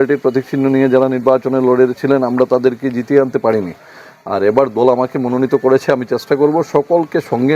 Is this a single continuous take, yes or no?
yes